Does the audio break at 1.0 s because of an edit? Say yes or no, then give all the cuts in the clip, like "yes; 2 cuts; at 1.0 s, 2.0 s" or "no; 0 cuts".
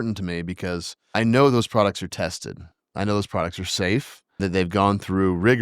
yes; 2 cuts; at 1.0 s, 4.4 s